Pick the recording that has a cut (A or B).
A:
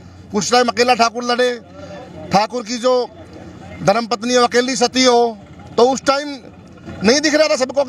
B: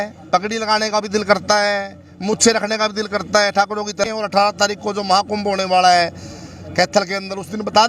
B